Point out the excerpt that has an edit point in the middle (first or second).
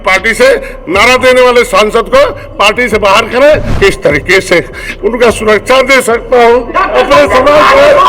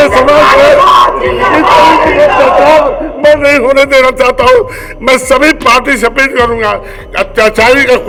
first